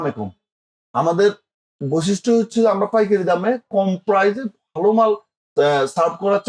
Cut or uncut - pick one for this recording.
uncut